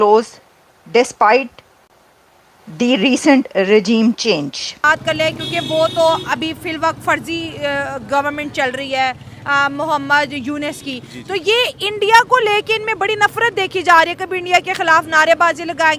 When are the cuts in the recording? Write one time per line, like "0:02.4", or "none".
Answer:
0:04.8